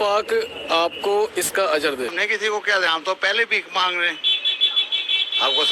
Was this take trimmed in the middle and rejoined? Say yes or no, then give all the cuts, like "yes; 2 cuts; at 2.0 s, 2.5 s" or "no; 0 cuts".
yes; 1 cut; at 2.2 s